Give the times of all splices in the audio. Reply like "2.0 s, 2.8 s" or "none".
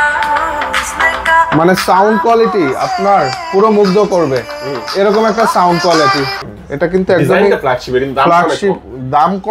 6.4 s

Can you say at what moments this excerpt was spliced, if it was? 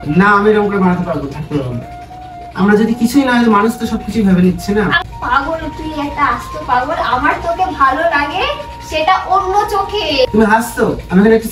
5.0 s, 10.3 s

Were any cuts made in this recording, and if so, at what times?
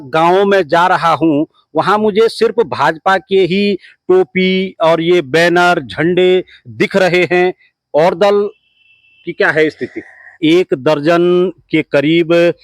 10.4 s

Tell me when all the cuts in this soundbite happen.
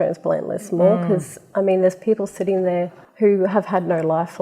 3.0 s

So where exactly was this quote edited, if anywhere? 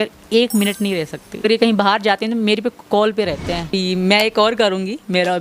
1.4 s, 3.7 s

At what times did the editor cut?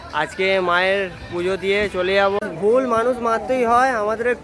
2.4 s

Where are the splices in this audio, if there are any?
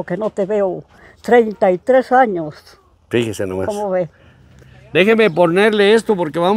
none

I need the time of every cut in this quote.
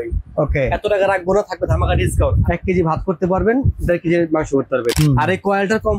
2.4 s, 4.9 s

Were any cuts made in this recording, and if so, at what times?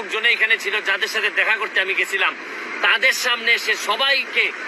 none

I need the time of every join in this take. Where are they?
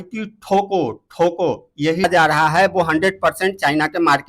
2.1 s

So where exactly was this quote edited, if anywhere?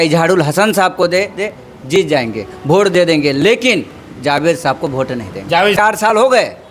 5.8 s

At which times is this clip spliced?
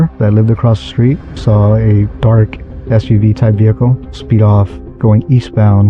1.3 s, 4.8 s

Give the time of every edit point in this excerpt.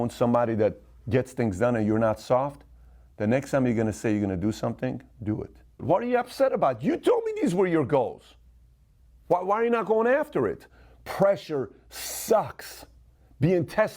5.8 s, 10.7 s

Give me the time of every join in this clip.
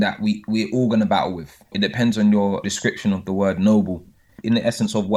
1.7 s, 2.7 s, 4.3 s

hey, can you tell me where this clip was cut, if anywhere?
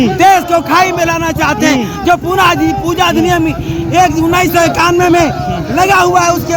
none

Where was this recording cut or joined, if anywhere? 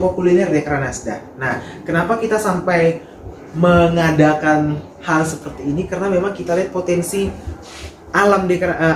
none

